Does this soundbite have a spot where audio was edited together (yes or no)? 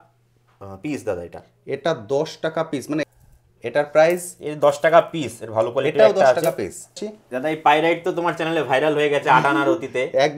yes